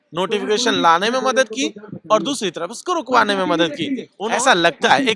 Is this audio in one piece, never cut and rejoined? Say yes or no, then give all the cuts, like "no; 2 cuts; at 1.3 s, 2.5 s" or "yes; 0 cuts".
no; 1 cut; at 4.1 s